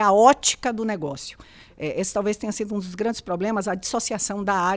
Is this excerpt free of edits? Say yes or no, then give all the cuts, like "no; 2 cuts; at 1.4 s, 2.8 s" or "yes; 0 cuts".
yes; 0 cuts